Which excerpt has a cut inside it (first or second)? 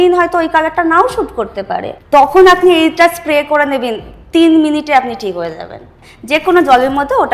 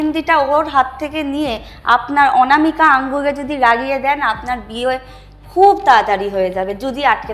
first